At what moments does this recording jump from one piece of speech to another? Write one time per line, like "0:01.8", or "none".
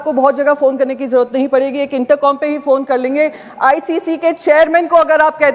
none

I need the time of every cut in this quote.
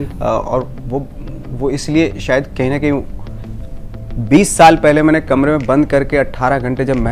none

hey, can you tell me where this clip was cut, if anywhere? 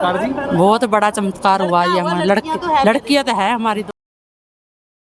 none

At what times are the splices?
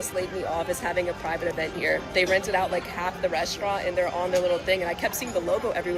none

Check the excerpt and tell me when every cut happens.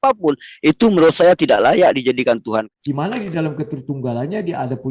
0:02.7

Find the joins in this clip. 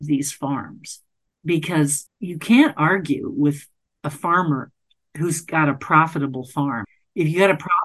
0:02.1
0:06.9

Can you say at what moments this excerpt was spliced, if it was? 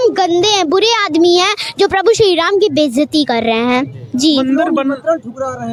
none

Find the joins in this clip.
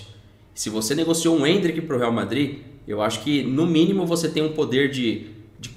none

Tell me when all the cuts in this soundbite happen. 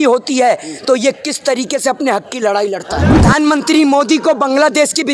0:03.1

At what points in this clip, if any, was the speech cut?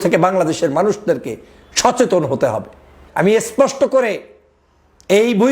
0:03.0

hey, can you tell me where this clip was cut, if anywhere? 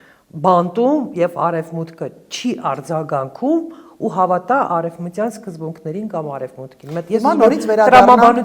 none

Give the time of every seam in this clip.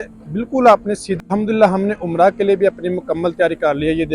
0:01.2

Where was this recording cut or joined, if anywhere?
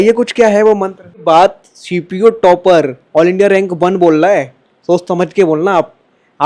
0:01.1

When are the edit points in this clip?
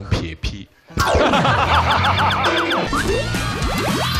0:02.9

